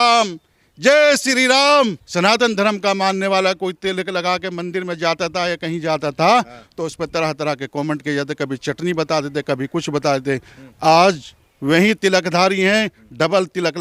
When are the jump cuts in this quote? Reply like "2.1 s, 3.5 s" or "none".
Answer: 2.0 s